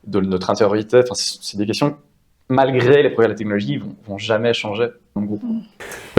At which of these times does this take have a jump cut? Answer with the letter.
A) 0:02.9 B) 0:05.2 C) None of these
B